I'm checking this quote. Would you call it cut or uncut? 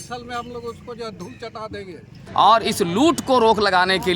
cut